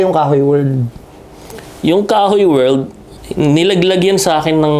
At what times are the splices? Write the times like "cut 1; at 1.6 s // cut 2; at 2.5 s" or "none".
cut 1; at 3.2 s